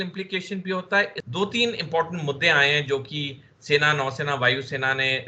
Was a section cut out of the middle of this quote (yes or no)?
yes